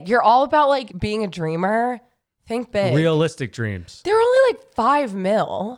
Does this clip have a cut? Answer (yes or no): yes